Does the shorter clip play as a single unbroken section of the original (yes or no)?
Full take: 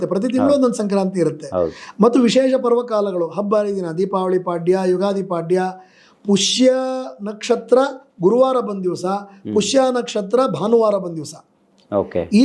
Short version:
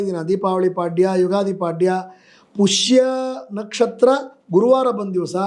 yes